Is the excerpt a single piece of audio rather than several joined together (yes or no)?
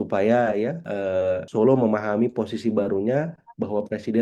no